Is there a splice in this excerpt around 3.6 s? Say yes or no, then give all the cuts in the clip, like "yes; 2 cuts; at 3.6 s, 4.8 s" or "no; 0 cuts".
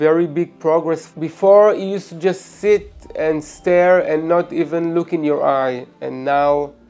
no; 1 cut; at 1.1 s